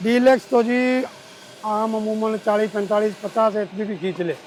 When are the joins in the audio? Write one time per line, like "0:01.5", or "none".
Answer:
none